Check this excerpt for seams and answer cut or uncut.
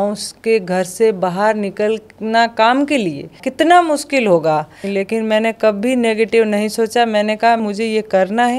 cut